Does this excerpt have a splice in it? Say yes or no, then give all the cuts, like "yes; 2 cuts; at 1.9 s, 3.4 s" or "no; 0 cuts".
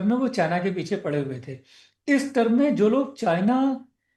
no; 0 cuts